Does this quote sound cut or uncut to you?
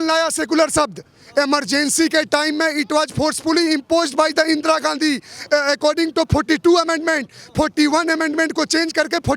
uncut